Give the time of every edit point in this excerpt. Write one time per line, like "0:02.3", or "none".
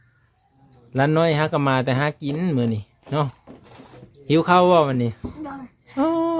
none

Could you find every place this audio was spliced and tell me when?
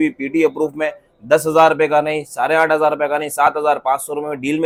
none

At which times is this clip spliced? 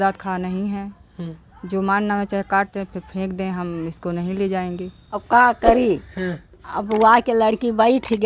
0:05.2

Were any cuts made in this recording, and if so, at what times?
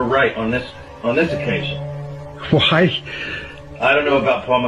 none

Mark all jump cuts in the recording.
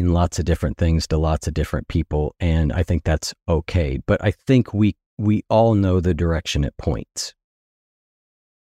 none

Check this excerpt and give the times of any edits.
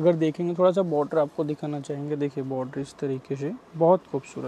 none

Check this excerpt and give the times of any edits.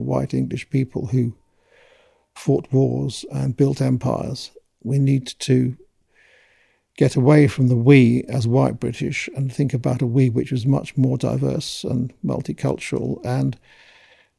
0:02.4
0:04.8

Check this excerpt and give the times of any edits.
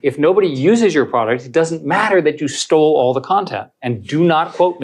none

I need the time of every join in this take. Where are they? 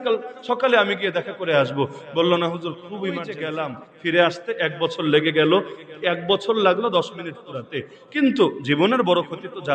0:03.4

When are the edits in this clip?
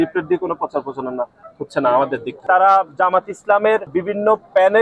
0:02.4
0:03.9

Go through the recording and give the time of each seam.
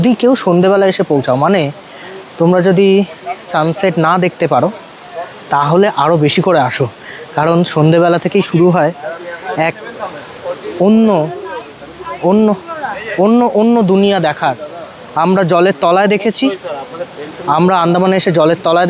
none

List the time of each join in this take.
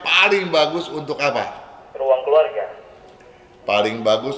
none

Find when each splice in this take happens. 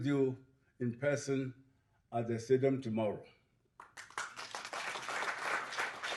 none

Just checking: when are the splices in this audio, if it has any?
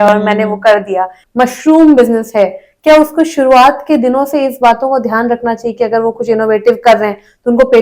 0:01.2

